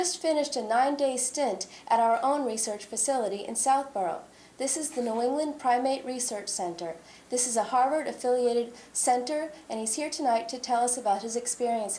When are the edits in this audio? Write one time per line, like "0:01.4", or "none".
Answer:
none